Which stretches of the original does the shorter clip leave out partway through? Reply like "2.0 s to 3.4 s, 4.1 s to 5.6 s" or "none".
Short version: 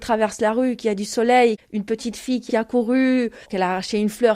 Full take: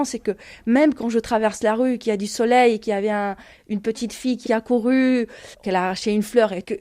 2.8 s to 3.6 s, 5.4 s to 5.5 s